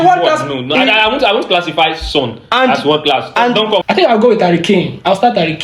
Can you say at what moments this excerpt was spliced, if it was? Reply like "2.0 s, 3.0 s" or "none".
3.8 s